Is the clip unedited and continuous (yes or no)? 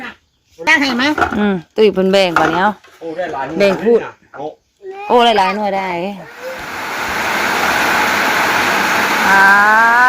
no